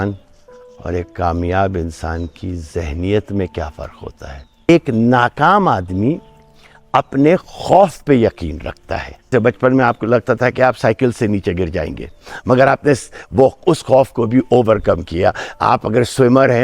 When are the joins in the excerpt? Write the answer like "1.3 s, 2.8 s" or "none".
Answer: 4.7 s, 9.3 s